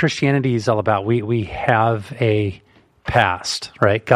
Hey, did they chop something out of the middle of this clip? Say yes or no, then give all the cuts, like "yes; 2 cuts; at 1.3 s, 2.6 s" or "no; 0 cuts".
no; 0 cuts